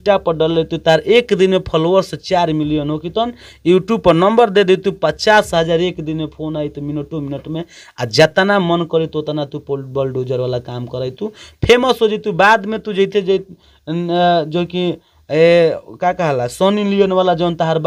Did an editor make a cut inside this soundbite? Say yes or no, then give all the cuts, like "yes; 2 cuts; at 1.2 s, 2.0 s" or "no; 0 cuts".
no; 0 cuts